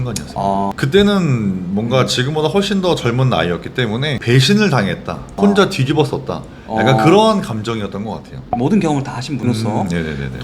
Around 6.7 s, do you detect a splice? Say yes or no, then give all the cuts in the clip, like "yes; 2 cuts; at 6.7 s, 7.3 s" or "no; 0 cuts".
no; 1 cut; at 8.3 s